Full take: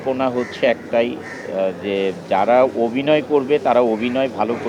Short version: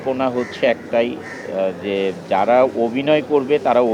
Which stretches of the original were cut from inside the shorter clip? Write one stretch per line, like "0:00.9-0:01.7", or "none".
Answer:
none